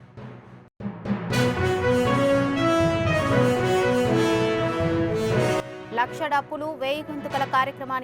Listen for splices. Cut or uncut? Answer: cut